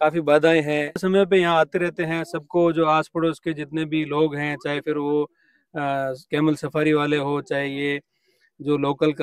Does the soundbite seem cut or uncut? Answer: cut